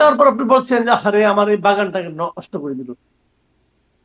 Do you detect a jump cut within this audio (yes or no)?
no